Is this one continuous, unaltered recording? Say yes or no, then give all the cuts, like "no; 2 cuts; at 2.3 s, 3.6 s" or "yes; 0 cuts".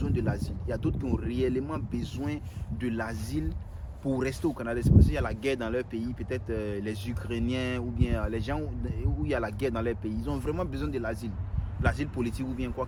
yes; 0 cuts